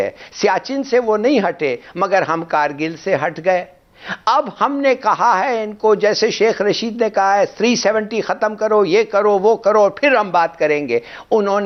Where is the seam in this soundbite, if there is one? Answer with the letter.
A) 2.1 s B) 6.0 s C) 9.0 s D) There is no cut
D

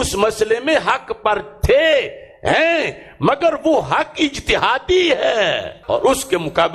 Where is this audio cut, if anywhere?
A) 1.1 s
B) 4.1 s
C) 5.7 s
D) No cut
C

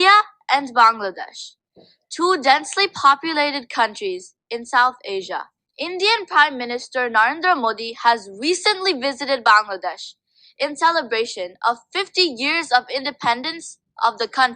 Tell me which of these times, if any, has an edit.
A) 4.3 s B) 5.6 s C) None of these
B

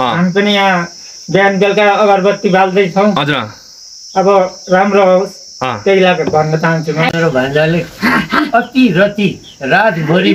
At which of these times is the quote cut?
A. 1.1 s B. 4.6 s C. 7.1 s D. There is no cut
C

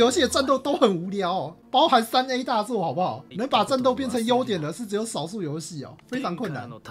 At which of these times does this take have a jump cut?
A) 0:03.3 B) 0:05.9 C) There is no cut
A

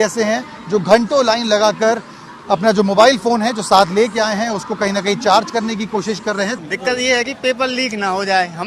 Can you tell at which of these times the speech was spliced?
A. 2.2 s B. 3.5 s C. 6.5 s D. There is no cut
C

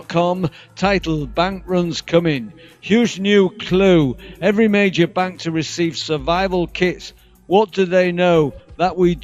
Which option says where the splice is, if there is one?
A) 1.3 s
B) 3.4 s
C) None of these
A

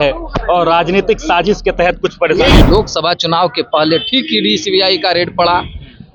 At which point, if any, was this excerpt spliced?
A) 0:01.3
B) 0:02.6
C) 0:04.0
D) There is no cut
B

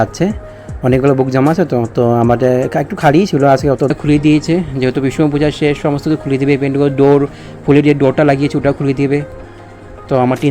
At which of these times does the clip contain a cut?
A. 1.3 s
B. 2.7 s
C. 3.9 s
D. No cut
C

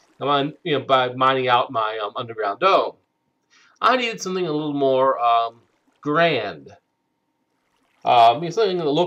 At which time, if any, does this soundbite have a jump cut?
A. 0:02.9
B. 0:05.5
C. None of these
C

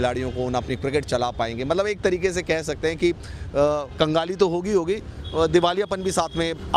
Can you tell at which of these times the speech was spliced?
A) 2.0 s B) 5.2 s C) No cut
C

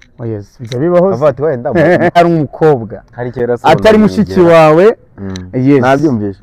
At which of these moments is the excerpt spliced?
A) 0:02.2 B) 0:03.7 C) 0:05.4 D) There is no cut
A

